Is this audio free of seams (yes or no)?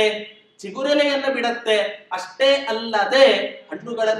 yes